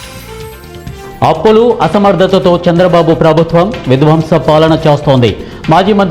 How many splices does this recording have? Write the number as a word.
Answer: one